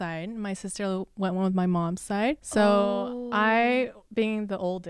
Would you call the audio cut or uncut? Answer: cut